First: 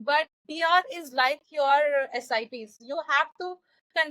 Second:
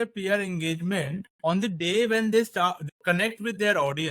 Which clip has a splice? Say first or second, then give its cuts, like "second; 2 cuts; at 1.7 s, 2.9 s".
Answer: first; 1 cut; at 2.7 s